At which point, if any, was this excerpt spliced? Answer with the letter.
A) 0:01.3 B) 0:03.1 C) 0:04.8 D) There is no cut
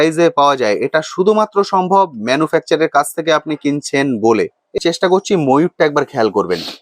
C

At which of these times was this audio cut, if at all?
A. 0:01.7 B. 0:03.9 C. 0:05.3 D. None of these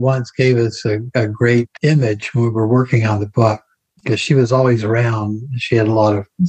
A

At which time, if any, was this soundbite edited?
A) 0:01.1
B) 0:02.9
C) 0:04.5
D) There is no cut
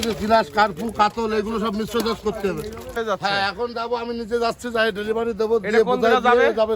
B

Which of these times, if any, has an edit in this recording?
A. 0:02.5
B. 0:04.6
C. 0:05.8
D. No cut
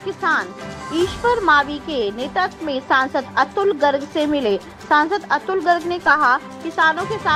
D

